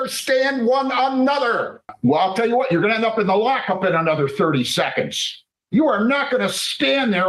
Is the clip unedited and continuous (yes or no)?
no